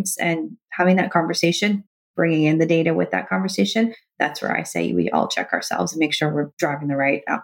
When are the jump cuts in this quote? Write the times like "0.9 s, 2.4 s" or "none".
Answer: 6.5 s